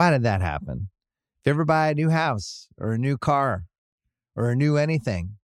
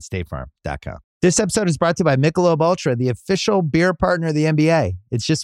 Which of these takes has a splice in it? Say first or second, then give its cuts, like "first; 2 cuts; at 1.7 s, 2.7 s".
second; 1 cut; at 1.1 s